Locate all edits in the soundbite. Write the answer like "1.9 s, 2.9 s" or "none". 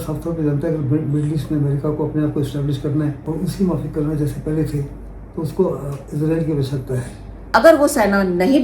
3.2 s, 7.3 s